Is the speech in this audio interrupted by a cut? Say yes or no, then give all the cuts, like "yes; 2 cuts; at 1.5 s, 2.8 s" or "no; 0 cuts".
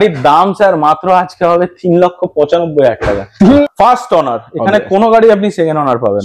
yes; 1 cut; at 3.6 s